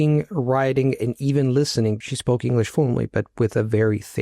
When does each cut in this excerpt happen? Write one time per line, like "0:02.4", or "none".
0:02.0